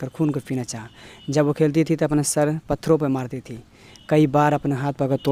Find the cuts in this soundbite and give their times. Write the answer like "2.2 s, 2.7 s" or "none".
none